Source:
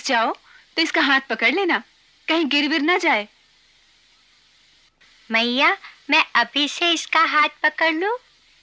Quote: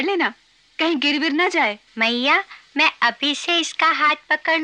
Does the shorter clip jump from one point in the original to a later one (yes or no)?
yes